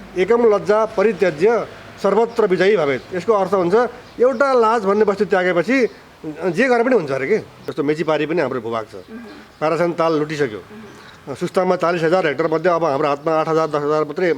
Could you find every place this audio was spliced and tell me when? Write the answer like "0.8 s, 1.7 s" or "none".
7.7 s